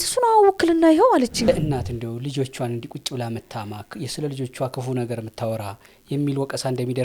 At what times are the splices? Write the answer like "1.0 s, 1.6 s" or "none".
1.5 s